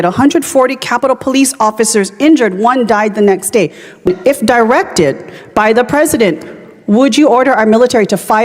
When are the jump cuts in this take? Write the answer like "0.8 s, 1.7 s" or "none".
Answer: 4.1 s